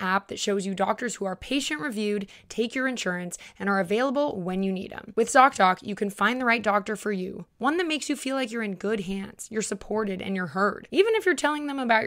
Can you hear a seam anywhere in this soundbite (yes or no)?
no